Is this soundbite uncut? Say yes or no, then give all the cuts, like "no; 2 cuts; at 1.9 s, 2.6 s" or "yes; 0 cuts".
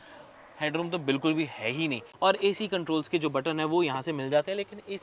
no; 1 cut; at 2.0 s